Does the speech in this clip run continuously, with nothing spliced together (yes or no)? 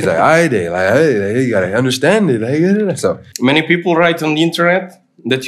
no